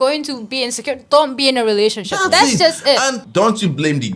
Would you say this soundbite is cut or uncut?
cut